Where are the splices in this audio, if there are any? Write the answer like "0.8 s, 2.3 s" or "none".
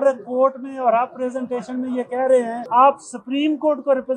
2.6 s